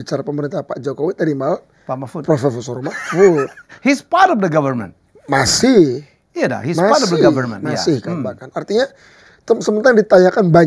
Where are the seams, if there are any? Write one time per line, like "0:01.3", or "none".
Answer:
none